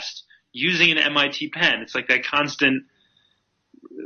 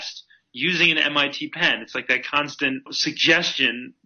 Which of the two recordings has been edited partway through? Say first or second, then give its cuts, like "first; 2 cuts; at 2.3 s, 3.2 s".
second; 1 cut; at 2.9 s